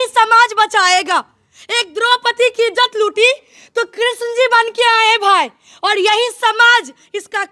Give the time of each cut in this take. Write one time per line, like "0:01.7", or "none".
none